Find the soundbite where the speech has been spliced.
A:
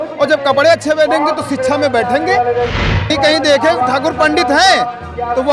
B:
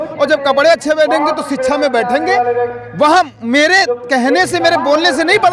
A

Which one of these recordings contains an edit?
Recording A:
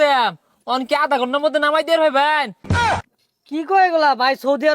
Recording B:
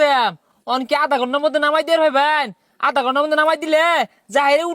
A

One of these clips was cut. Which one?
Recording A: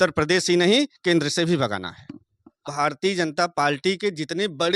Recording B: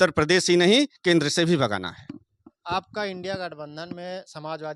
A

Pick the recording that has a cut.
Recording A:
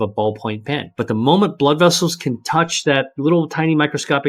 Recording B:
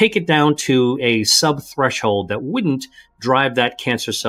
A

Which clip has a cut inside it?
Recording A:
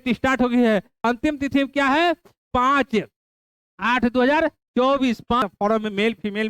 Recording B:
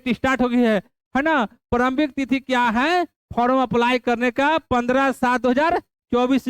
A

